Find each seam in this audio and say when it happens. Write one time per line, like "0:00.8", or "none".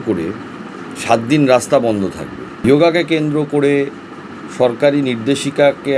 0:02.5